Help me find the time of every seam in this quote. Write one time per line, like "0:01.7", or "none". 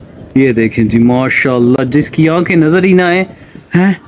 none